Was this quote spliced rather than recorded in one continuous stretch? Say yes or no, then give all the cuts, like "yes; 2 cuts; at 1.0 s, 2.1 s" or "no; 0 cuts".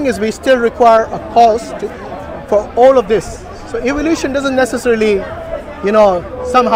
no; 0 cuts